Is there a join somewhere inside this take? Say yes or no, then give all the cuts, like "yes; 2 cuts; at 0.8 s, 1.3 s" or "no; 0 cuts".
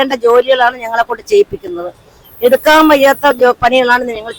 no; 0 cuts